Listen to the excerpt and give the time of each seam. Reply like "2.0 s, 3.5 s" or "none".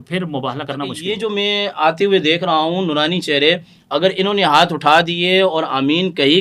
1.1 s